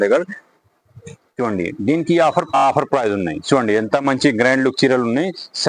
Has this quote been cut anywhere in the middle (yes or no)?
yes